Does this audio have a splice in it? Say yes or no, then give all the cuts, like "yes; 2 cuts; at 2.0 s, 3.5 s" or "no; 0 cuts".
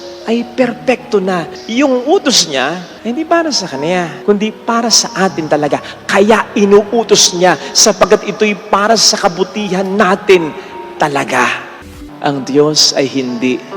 yes; 4 cuts; at 1.6 s, 2.9 s, 4.1 s, 11.8 s